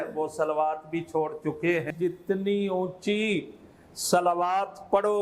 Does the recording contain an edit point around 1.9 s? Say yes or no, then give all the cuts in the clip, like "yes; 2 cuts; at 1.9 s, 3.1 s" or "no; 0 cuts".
yes; 1 cut; at 1.9 s